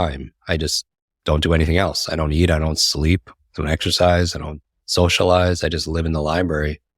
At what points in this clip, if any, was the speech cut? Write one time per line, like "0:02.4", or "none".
none